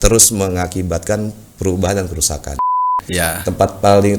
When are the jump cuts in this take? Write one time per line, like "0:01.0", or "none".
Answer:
0:02.8